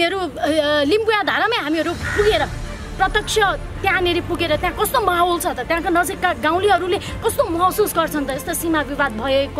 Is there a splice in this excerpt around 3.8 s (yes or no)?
no